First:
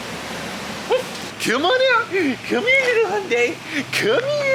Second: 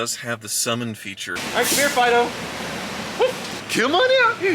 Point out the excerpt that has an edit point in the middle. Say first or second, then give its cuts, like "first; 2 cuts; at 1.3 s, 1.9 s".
second; 1 cut; at 1.4 s